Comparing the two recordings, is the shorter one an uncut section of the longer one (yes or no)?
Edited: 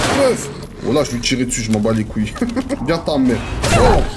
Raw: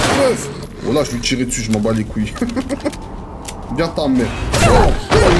no